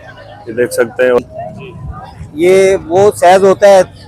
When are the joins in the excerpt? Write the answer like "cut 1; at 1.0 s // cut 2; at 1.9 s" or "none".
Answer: cut 1; at 1.2 s